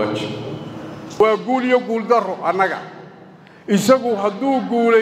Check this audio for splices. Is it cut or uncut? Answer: cut